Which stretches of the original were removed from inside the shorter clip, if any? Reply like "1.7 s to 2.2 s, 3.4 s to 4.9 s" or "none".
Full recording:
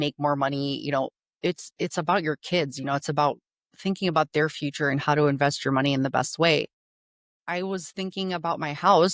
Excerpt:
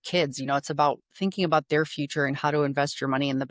3.5 s to 3.7 s